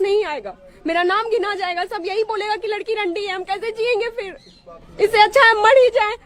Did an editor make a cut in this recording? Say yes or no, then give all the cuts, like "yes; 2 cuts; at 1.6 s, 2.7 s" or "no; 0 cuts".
no; 0 cuts